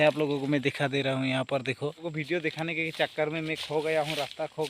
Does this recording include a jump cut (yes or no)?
yes